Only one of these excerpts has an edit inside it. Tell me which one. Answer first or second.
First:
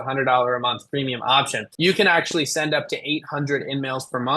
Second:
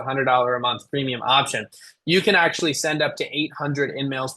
first